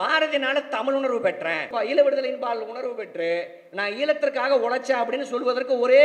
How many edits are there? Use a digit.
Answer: 1